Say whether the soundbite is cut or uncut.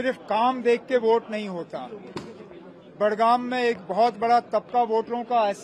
uncut